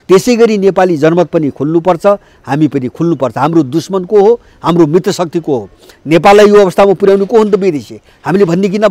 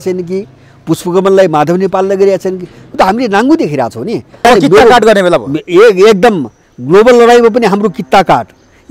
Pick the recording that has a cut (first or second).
second